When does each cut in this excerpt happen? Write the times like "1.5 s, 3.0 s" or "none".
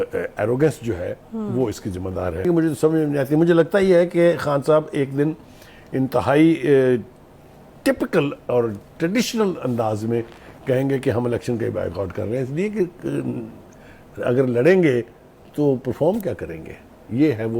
2.4 s